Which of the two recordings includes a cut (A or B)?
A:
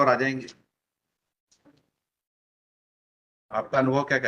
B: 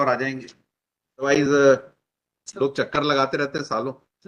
B